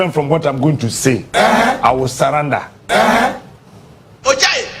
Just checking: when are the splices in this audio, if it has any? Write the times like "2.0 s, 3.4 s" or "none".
none